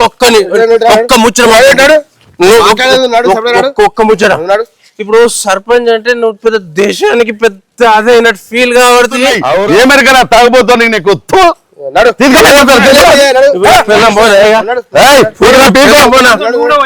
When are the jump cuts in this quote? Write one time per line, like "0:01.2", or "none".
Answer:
0:09.6